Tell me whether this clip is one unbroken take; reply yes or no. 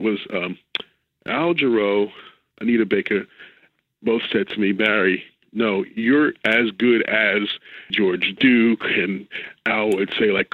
no